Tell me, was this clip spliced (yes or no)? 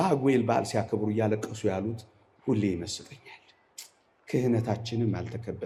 no